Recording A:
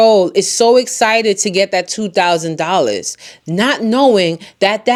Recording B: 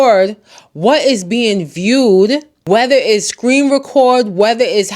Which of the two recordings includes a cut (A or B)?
B